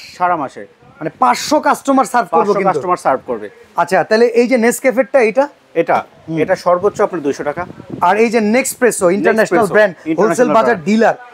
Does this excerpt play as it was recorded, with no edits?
yes; 0 cuts

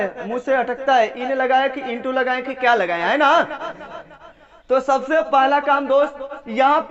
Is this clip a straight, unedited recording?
yes; 0 cuts

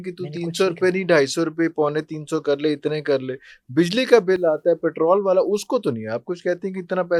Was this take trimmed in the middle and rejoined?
no; 0 cuts

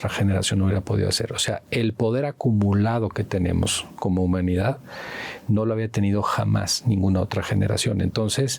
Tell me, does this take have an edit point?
no; 0 cuts

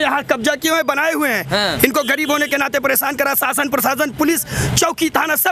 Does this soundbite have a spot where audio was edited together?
no; 0 cuts

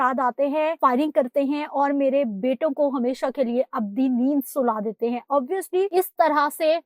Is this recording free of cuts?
no; 2 cuts; at 0.8 s, 5.9 s

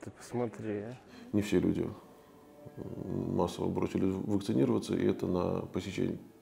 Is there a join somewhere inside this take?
yes; 1 cut; at 1.1 s

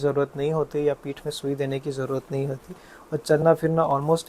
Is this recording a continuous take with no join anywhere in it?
yes; 0 cuts

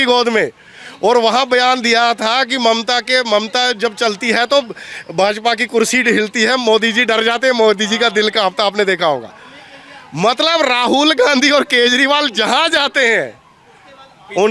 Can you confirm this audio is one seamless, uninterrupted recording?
yes; 0 cuts

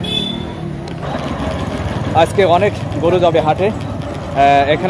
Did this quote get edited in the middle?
no; 0 cuts

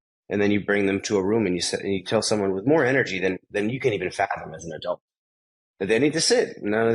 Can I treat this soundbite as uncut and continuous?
yes; 0 cuts

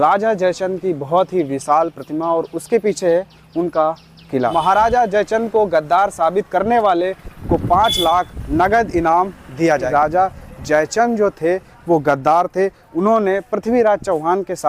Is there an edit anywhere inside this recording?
yes; 3 cuts; at 4.5 s, 8.4 s, 9.9 s

